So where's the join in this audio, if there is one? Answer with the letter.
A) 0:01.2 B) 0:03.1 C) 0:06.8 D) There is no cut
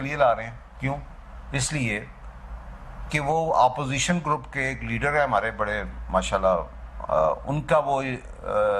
D